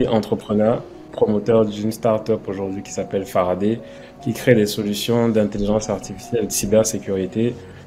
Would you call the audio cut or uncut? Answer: cut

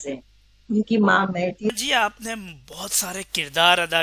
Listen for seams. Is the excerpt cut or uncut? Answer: cut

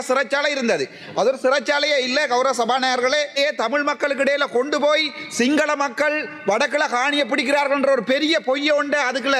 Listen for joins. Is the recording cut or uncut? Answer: cut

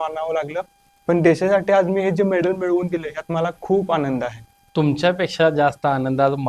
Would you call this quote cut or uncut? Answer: uncut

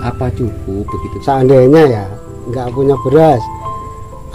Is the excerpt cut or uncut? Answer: cut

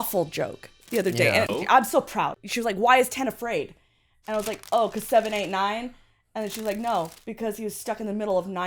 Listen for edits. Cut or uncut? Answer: cut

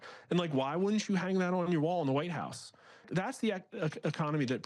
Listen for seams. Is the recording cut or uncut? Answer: cut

